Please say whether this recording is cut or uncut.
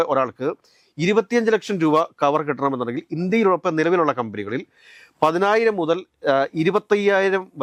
uncut